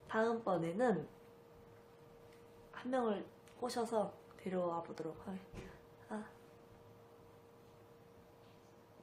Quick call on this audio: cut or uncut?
cut